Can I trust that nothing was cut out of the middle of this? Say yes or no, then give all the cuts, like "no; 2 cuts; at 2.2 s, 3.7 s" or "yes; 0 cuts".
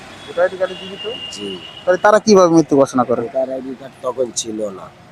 yes; 0 cuts